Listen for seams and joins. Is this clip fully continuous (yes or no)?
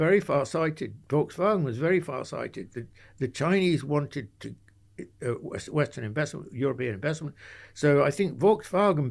yes